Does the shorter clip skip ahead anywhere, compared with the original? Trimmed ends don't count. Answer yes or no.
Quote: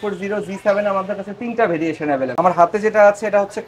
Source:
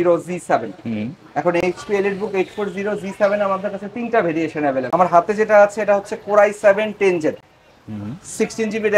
no